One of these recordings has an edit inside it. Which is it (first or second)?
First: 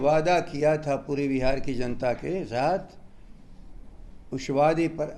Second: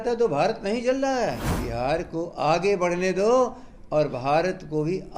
second